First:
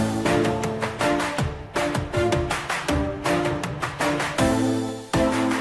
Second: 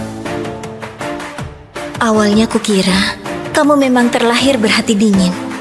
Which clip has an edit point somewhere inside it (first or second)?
first